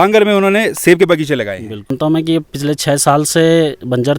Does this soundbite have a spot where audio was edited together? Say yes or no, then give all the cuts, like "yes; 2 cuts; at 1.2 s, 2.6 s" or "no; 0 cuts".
yes; 1 cut; at 1.9 s